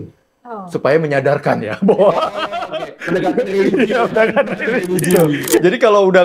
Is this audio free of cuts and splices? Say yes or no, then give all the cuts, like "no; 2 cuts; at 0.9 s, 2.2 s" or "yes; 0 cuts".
no; 1 cut; at 5.1 s